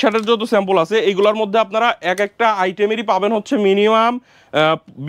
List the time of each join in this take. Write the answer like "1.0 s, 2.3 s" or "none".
none